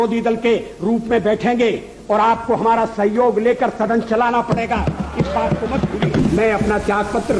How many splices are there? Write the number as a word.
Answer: one